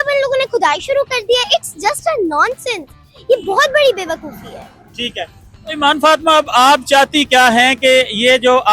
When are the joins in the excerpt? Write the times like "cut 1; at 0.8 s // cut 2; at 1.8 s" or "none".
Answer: none